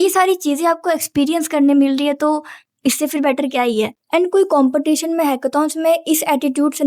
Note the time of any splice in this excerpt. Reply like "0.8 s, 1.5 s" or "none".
none